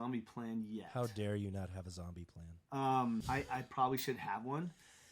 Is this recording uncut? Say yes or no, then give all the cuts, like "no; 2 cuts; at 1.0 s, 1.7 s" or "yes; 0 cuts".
no; 1 cut; at 3.2 s